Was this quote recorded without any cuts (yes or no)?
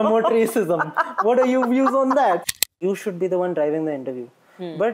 no